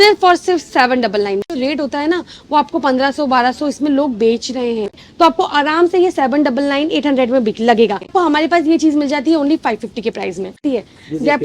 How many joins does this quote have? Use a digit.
4